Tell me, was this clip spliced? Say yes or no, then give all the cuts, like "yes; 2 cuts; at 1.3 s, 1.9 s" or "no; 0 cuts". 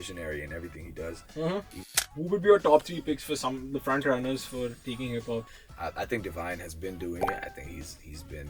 yes; 2 cuts; at 1.9 s, 5.6 s